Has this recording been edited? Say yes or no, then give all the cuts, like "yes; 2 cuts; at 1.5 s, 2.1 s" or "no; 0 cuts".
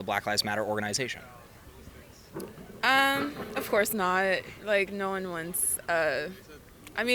no; 0 cuts